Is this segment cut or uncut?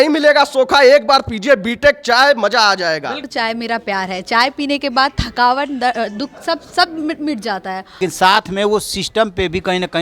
cut